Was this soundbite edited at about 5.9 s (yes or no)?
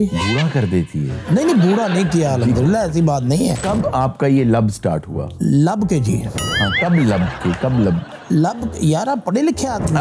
no